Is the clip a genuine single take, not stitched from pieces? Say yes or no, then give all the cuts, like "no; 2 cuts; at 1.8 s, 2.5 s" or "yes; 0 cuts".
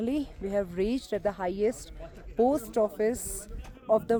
yes; 0 cuts